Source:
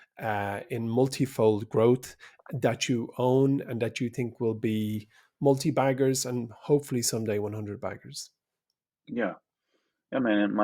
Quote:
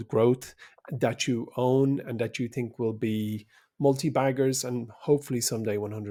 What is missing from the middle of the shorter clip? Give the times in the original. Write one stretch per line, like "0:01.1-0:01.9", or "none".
none